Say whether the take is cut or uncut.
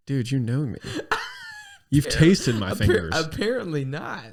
uncut